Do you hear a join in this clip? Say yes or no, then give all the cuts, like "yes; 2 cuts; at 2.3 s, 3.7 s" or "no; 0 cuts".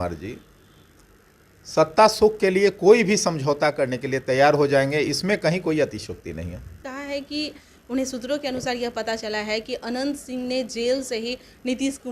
yes; 1 cut; at 6.9 s